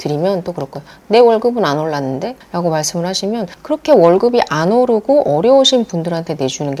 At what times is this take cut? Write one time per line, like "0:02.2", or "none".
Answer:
none